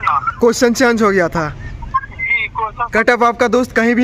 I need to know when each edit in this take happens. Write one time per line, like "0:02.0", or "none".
0:02.8